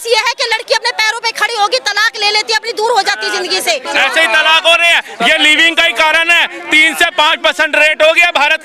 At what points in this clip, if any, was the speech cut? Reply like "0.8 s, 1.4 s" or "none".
3.9 s